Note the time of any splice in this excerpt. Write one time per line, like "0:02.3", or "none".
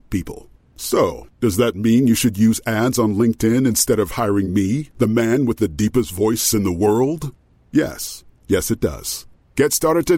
none